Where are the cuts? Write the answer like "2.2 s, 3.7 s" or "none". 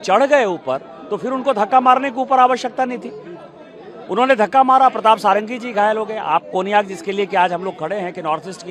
none